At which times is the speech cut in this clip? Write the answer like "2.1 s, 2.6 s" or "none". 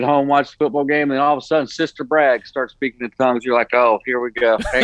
none